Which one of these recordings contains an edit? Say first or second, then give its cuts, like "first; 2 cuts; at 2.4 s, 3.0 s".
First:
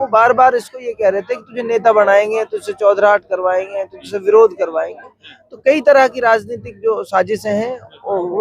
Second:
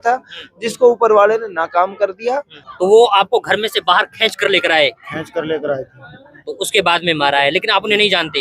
second; 1 cut; at 2.6 s